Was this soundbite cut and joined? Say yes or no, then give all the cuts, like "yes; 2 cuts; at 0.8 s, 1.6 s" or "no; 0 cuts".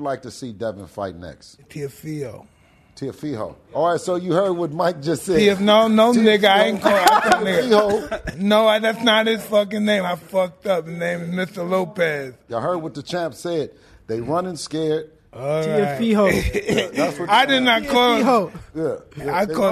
yes; 4 cuts; at 1.7 s, 3.8 s, 12.4 s, 15.2 s